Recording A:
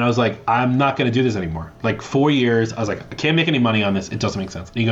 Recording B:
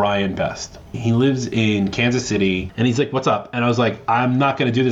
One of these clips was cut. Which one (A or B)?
B